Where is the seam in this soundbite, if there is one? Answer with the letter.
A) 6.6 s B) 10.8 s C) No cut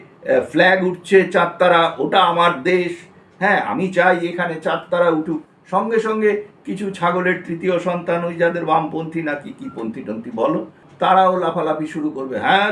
B